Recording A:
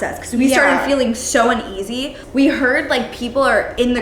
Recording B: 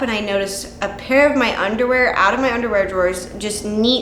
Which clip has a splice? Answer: A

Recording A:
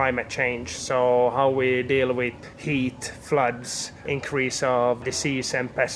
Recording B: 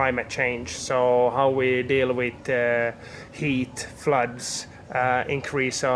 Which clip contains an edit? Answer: A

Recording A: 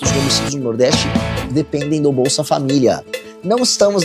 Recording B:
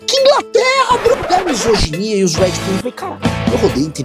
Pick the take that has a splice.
B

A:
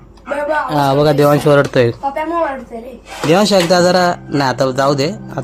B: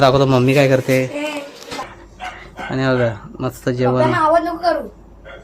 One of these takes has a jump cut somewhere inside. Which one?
B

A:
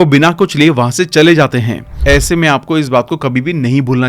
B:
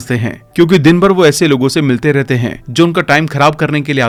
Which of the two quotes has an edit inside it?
A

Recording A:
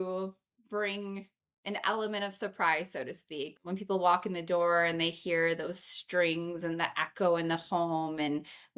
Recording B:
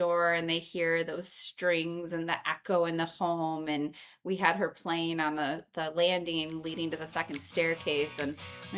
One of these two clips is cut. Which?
A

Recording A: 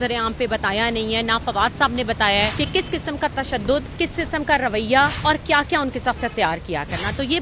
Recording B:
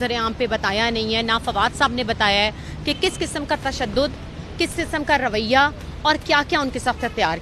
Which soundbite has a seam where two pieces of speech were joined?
A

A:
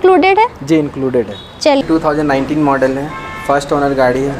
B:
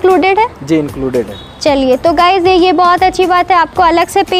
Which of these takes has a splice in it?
A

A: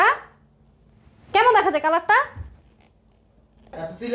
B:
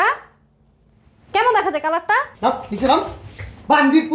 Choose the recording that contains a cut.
B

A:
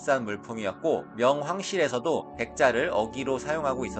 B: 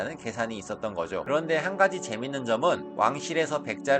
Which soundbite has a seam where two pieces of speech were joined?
B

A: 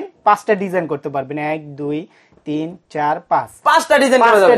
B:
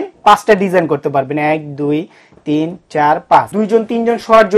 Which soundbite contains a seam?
B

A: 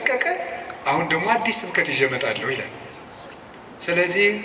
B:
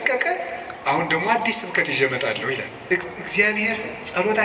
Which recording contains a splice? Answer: B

